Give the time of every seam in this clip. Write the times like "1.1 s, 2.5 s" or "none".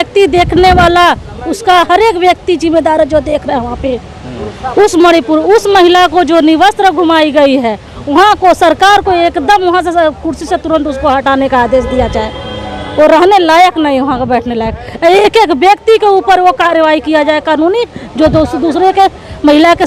none